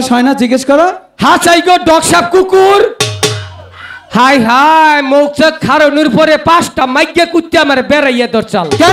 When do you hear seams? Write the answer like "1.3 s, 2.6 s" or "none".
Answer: none